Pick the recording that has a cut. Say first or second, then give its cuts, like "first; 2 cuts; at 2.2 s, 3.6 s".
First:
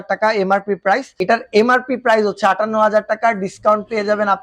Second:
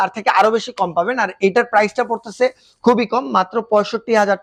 first; 1 cut; at 1.1 s